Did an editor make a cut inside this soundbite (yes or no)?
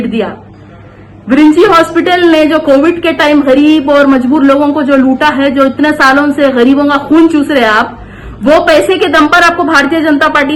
no